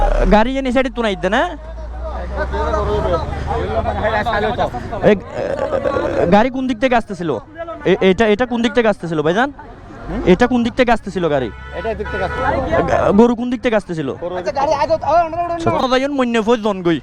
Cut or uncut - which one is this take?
cut